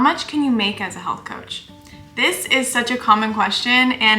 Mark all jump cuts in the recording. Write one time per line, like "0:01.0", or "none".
none